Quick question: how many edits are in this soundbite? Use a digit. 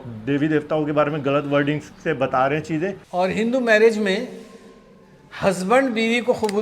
1